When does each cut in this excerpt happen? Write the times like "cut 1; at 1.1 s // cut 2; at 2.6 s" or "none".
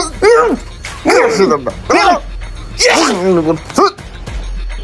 none